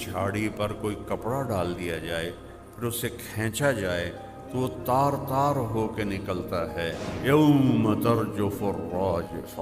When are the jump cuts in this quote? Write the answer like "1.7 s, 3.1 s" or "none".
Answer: 7.0 s